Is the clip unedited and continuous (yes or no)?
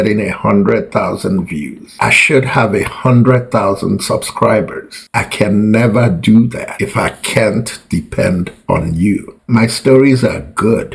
no